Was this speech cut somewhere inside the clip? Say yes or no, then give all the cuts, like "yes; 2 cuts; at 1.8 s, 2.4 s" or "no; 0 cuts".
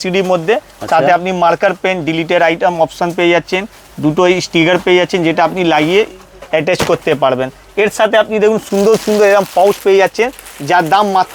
no; 0 cuts